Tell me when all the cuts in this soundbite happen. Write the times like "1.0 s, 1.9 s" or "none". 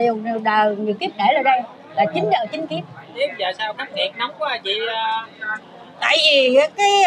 3.1 s